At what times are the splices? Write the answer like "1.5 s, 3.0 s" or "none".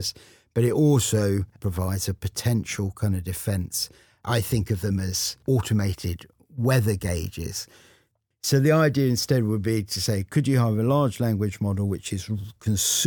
1.6 s, 4.2 s, 5.3 s, 8.1 s